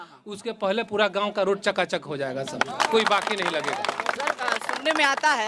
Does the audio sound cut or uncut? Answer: uncut